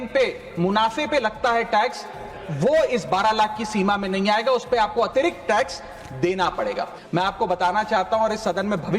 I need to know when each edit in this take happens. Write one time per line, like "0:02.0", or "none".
0:07.0